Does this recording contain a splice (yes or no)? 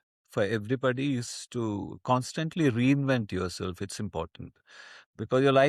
no